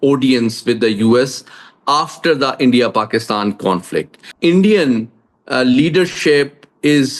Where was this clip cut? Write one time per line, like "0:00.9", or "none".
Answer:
0:04.2